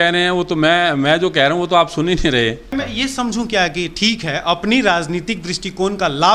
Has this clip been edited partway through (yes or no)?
yes